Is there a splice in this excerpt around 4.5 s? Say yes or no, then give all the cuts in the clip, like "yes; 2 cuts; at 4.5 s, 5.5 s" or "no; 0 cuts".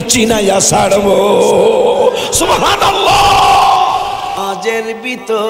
yes; 1 cut; at 4.5 s